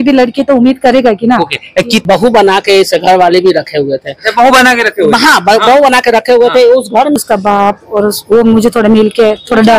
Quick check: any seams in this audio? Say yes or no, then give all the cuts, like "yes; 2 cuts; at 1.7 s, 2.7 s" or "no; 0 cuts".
yes; 2 cuts; at 2.0 s, 7.2 s